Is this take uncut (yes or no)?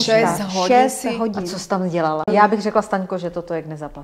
no